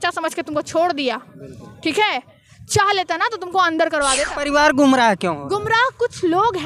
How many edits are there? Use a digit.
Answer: 1